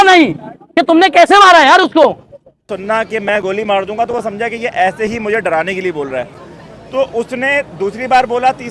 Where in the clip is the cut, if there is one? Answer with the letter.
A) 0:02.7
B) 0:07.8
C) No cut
A